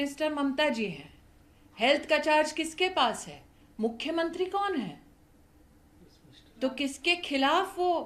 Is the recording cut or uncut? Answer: uncut